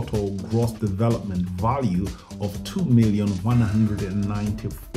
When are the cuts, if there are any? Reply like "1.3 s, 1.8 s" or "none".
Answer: none